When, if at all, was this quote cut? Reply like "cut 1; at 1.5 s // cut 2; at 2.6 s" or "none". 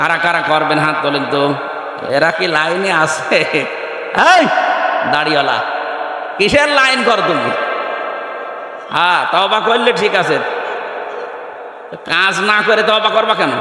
cut 1; at 1.9 s